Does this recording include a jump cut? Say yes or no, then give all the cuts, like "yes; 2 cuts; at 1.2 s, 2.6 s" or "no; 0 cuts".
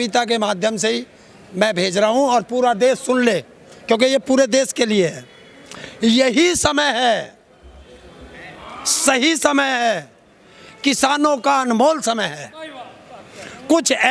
no; 0 cuts